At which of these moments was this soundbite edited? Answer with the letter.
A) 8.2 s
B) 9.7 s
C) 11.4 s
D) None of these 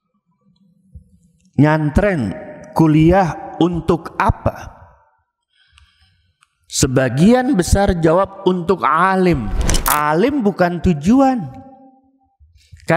B